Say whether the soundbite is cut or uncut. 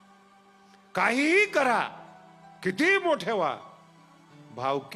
cut